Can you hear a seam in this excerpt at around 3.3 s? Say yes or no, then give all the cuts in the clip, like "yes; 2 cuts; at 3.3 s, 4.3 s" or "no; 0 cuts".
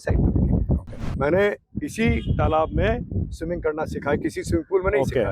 no; 1 cut; at 1.1 s